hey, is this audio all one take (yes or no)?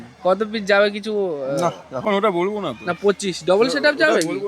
no